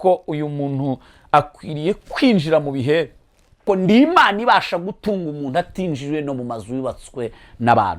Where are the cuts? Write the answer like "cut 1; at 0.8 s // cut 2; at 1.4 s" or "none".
cut 1; at 3.6 s